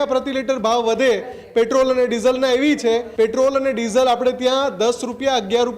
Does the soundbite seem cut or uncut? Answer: cut